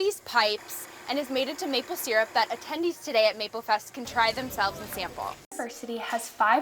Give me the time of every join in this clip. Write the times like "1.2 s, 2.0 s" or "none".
5.6 s